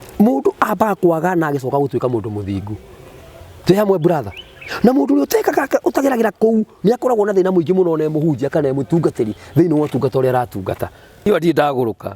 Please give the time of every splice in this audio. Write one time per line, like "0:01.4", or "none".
0:11.3